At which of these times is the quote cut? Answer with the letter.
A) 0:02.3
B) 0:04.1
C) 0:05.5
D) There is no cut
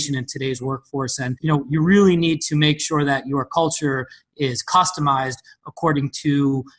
D